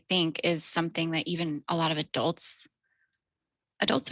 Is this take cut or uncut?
uncut